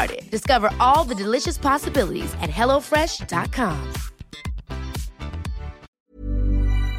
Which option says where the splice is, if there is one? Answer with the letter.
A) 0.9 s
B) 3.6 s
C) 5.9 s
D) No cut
C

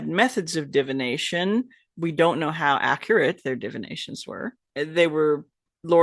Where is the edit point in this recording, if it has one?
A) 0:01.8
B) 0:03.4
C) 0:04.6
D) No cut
C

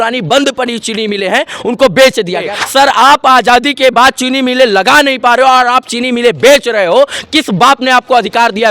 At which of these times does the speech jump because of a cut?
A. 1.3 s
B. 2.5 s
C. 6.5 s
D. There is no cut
B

